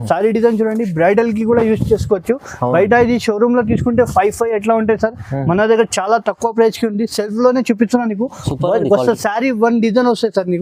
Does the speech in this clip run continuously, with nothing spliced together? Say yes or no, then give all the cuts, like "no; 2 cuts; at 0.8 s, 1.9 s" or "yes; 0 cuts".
yes; 0 cuts